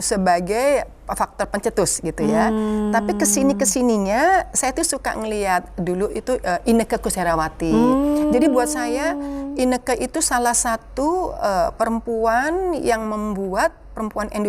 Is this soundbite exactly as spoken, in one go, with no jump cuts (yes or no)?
yes